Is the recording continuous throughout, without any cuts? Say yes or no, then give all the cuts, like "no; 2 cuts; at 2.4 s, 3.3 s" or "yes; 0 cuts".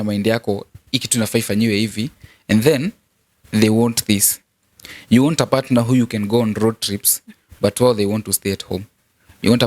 yes; 0 cuts